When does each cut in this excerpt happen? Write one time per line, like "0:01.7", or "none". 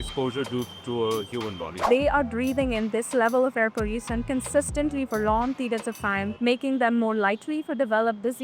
0:01.8
0:06.3